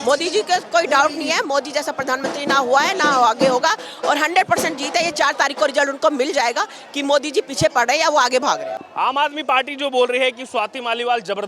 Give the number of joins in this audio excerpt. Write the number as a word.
zero